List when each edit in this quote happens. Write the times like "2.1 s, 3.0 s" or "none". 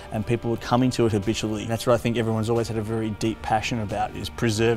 1.7 s